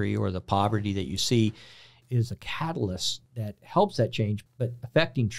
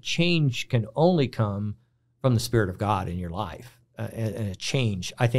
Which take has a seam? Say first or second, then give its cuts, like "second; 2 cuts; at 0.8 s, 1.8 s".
first; 3 cuts; at 1.9 s, 3.2 s, 4.4 s